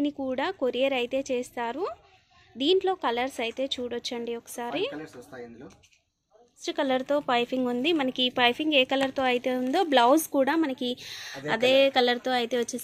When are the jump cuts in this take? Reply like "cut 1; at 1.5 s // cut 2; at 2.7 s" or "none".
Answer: cut 1; at 6.7 s